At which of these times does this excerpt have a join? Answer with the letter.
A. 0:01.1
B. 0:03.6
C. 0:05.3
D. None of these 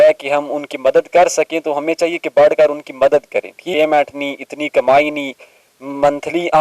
B